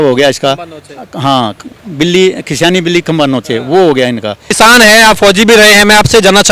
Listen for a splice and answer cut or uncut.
cut